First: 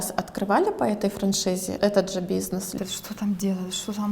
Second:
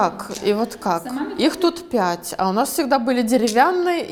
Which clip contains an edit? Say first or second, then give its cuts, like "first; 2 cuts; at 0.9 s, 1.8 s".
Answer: first; 2 cuts; at 1.7 s, 2.8 s